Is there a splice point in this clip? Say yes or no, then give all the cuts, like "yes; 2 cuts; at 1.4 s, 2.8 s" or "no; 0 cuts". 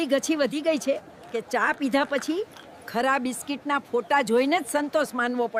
no; 0 cuts